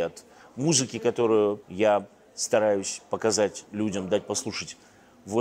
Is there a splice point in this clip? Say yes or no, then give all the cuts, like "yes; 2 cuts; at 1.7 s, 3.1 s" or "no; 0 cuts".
yes; 2 cuts; at 1.7 s, 3.6 s